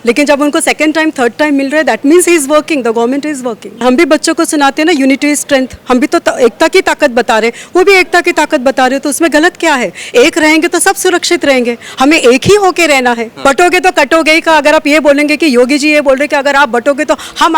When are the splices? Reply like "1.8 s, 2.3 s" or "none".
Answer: 3.8 s, 13.3 s